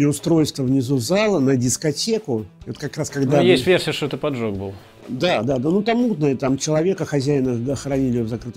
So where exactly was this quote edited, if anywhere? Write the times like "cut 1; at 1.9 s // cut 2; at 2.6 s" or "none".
none

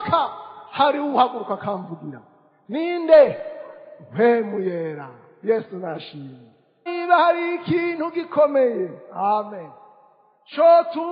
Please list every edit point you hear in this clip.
cut 1; at 6.9 s

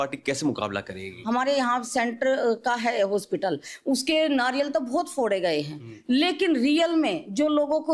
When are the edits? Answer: cut 1; at 1.1 s

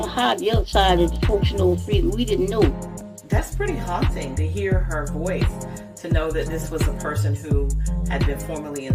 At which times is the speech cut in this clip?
none

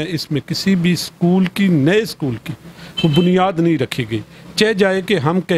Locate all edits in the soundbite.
none

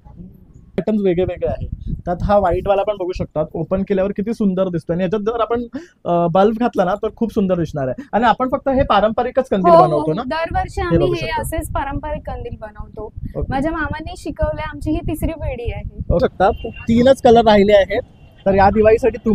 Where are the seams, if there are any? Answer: cut 1; at 0.8 s // cut 2; at 16.2 s

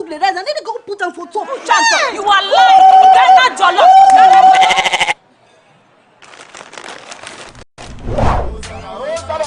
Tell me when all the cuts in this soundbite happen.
none

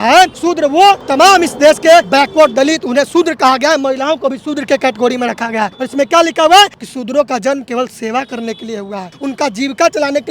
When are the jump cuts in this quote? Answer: cut 1; at 0.7 s // cut 2; at 2.1 s // cut 3; at 5.8 s // cut 4; at 6.9 s // cut 5; at 9.1 s

